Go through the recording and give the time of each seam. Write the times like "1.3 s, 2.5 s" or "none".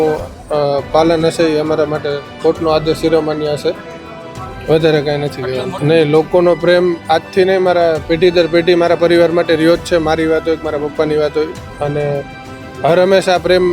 none